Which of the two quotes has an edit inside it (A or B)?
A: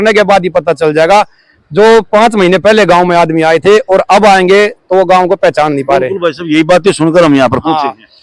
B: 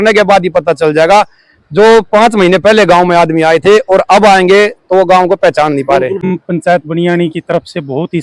B